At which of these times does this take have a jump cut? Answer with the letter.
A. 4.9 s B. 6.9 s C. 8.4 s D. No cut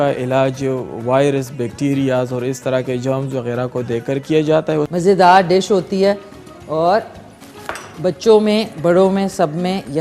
A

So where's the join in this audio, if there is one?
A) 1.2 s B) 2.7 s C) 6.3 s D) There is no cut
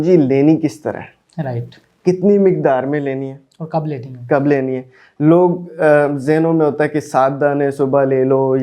D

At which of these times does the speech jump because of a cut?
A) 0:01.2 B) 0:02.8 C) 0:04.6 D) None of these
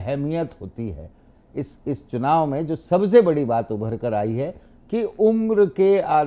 D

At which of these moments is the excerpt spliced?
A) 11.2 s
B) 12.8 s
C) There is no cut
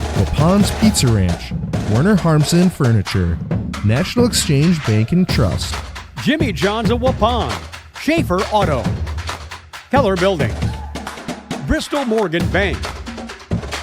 B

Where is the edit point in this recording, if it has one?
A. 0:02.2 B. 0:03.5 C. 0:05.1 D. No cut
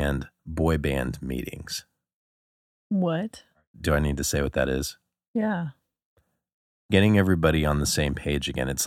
B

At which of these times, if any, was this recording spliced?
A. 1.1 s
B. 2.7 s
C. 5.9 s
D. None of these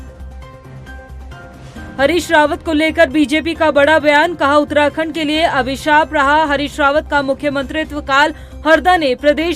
A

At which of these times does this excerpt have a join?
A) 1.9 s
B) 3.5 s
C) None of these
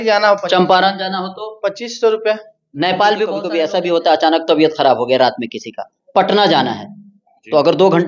B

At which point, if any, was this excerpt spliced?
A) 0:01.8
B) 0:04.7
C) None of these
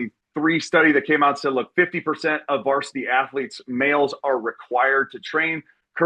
C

